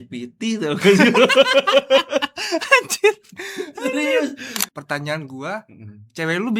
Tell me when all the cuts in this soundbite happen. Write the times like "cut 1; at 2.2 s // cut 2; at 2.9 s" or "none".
cut 1; at 4.6 s